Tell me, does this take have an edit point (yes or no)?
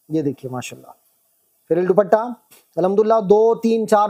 no